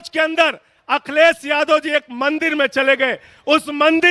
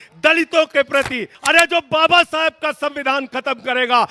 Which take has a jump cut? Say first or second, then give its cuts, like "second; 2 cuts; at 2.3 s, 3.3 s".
second; 1 cut; at 1.3 s